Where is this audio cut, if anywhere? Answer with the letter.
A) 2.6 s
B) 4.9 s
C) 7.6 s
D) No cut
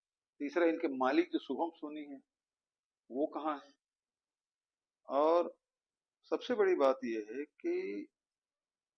D